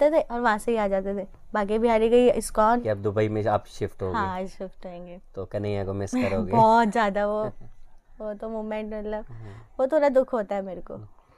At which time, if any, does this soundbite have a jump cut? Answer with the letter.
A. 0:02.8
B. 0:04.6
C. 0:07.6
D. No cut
A